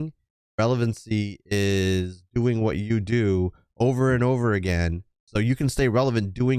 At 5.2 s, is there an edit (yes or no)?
yes